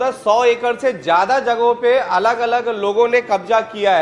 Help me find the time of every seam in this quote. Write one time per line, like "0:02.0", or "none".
none

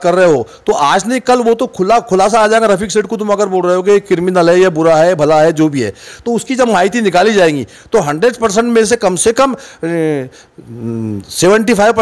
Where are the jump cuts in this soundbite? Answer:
none

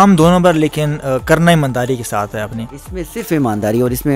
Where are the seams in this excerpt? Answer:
none

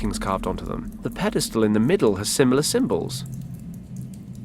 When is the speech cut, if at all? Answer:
0:03.1

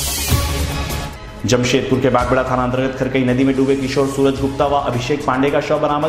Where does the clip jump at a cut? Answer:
0:01.1

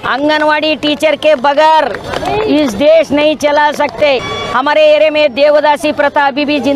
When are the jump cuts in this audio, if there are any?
0:04.3

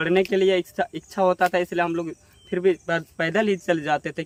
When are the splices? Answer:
none

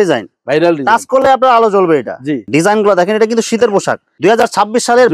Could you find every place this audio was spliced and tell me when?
0:02.4
0:04.0

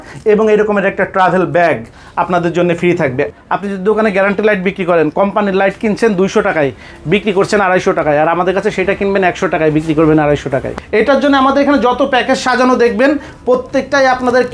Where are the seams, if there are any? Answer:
0:03.3
0:10.8

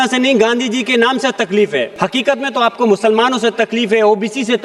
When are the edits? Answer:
0:01.9

